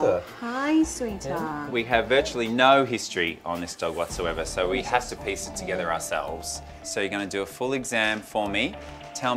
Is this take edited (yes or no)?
yes